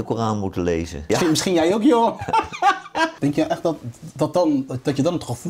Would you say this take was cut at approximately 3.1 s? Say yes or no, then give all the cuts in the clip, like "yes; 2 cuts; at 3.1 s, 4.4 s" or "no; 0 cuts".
yes; 2 cuts; at 1.0 s, 3.1 s